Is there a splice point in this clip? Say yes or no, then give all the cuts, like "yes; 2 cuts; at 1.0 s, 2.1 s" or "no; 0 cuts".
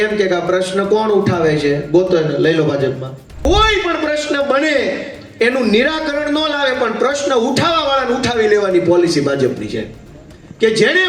yes; 1 cut; at 3.5 s